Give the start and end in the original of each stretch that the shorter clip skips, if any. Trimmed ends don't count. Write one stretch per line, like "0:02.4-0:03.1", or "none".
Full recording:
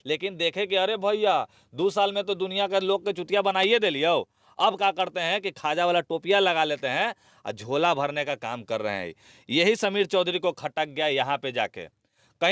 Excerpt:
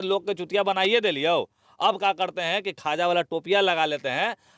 none

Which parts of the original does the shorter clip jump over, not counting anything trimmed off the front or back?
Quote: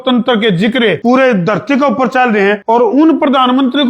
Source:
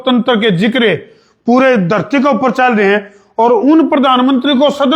0:01.0-0:01.4
0:03.0-0:03.3

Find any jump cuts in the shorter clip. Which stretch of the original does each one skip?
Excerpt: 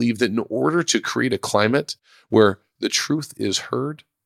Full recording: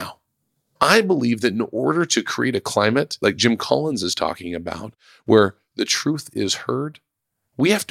0:03.1-0:04.9

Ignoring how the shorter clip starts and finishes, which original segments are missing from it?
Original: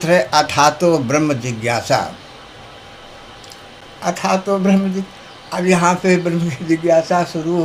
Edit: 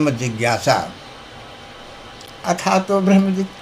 0:03.5-0:03.9

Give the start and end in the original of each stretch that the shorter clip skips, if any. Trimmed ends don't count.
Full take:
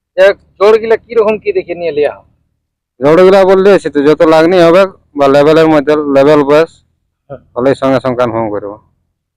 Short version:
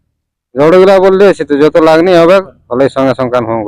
0:05.0-0:07.4

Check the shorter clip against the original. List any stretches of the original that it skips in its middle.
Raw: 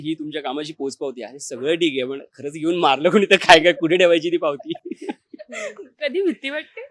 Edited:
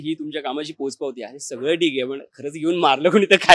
none

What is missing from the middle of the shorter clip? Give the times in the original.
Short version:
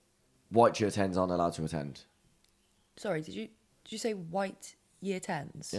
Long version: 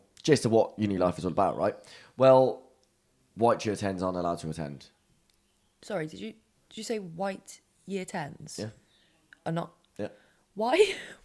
none

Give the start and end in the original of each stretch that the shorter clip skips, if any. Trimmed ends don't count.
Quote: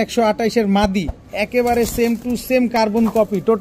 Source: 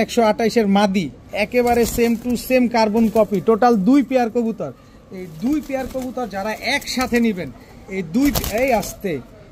none

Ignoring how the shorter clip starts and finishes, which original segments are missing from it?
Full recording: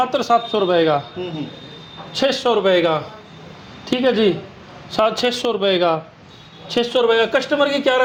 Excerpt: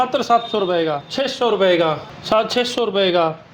0:01.0-0:02.1
0:03.1-0:04.8

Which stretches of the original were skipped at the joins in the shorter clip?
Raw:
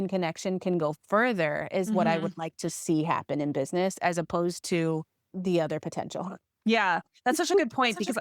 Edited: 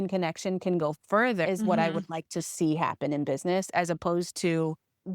0:01.5-0:01.7

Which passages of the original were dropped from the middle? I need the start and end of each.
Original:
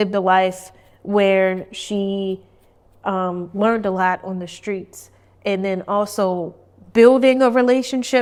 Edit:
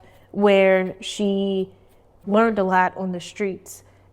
0:02.9-0:03.5

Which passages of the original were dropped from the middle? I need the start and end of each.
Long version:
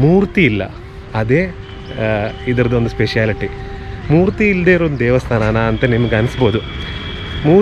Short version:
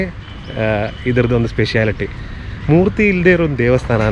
none

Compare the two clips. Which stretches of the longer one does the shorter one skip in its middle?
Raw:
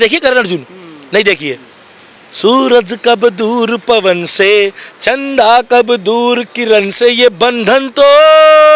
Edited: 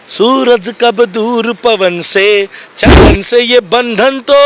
0:05.2-0:06.7

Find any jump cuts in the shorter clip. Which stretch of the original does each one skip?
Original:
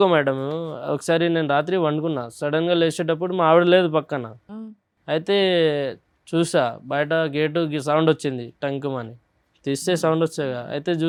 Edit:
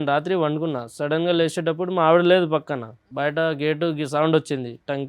0:04.5-0:06.8

